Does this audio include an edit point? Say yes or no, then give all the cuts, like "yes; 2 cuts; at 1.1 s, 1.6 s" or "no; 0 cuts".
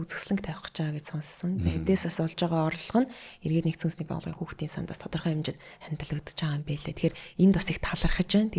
no; 0 cuts